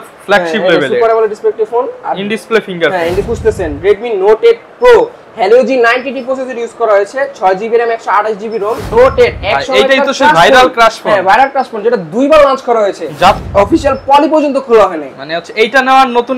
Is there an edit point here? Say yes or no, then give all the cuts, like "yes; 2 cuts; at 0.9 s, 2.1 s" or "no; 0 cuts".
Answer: yes; 3 cuts; at 3.3 s, 8.9 s, 13.4 s